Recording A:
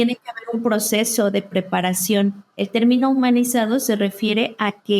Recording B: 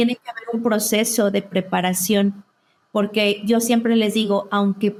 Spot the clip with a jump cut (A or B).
A